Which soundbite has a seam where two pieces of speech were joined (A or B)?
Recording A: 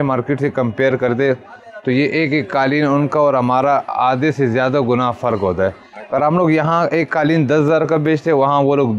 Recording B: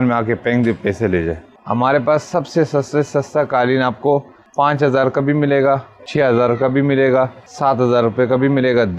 B